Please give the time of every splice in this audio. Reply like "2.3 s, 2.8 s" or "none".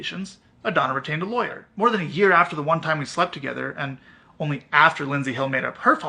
1.6 s

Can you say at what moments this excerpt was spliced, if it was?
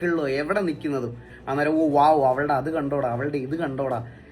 1.3 s

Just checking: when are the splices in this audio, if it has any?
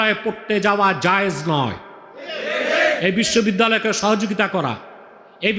none

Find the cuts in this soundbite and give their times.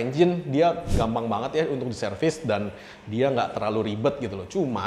none

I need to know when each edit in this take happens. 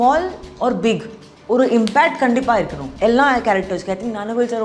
2.8 s

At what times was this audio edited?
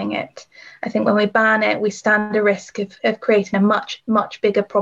none

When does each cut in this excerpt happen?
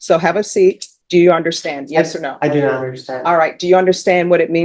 0.9 s

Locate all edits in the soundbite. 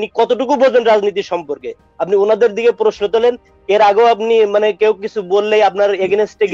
none

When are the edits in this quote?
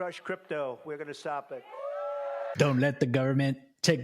2.5 s

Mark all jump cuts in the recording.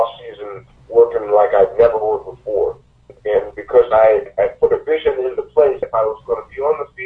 3.1 s, 4.3 s, 5.9 s

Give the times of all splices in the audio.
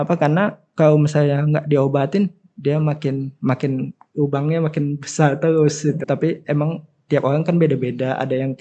6.0 s

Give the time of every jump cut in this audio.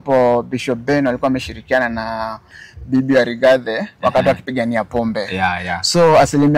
none

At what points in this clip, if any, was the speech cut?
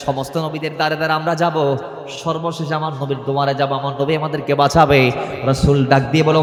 none

